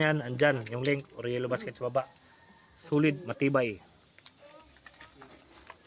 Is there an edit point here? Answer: no; 0 cuts

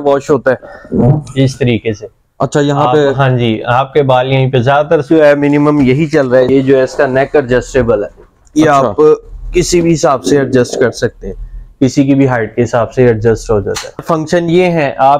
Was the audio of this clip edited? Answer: yes; 2 cuts; at 6.5 s, 14.0 s

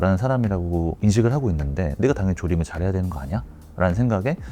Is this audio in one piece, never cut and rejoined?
yes; 0 cuts

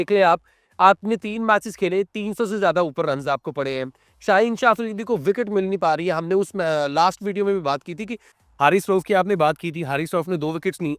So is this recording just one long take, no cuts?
no; 1 cut; at 8.3 s

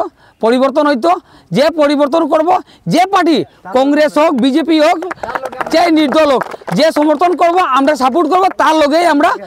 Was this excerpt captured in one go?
yes; 0 cuts

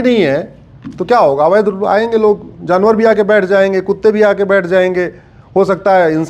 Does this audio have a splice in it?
no; 0 cuts

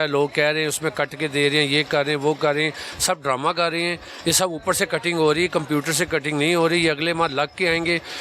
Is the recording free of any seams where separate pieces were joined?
yes; 0 cuts

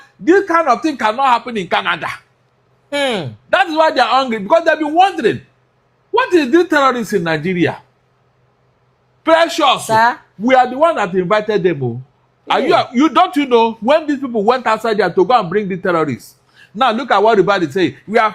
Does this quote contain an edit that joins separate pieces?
no; 0 cuts

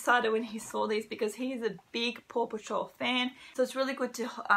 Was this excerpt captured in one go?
no; 1 cut; at 3.5 s

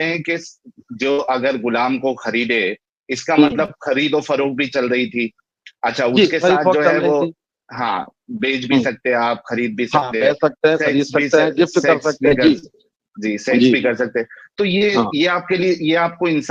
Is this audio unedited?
yes; 0 cuts

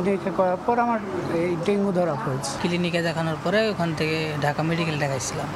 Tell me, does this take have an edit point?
no; 0 cuts

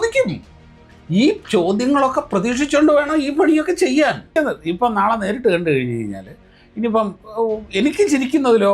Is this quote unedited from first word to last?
no; 1 cut; at 4.3 s

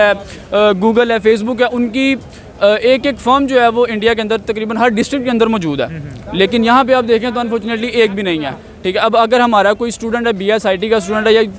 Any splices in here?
no; 0 cuts

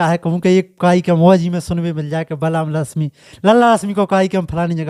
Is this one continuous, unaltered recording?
yes; 0 cuts

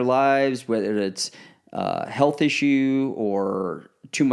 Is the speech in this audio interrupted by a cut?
no; 0 cuts

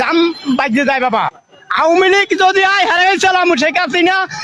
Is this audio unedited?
no; 1 cut; at 1.3 s

